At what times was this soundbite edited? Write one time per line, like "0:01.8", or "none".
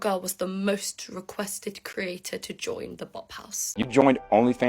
0:03.7